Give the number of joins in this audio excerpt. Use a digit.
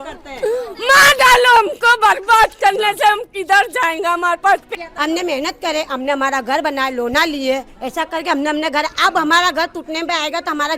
1